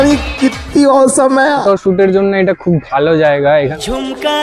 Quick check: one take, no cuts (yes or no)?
no